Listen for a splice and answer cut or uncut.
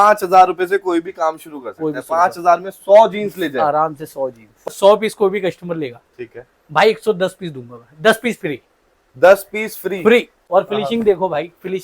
cut